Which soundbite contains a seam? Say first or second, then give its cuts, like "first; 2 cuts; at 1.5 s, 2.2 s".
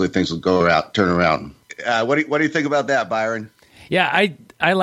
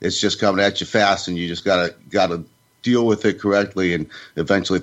first; 1 cut; at 1.6 s